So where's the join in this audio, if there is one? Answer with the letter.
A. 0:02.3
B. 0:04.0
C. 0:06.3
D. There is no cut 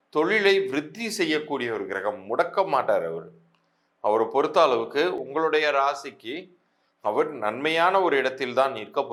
D